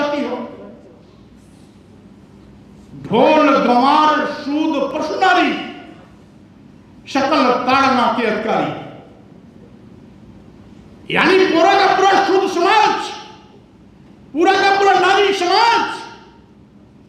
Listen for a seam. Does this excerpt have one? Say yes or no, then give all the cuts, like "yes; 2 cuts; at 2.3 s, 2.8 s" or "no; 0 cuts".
no; 0 cuts